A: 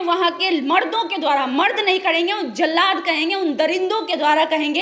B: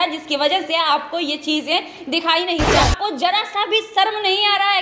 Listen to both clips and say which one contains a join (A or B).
B